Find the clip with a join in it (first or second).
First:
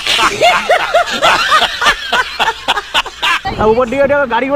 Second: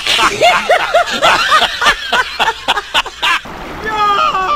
second